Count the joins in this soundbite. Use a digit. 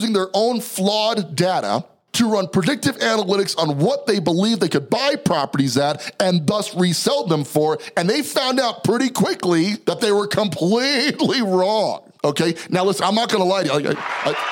3